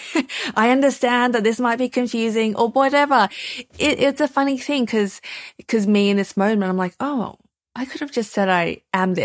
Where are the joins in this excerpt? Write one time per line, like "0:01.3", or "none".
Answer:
none